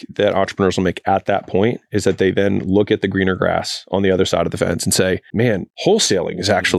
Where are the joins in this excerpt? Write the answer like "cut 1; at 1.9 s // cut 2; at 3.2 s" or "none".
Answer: cut 1; at 5.6 s